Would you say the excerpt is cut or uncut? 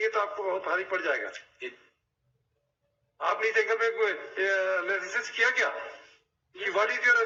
uncut